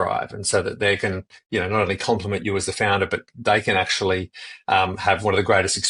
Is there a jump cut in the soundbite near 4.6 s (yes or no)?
no